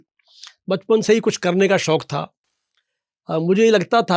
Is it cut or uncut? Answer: uncut